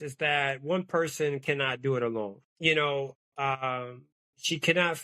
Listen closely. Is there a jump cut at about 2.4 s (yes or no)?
yes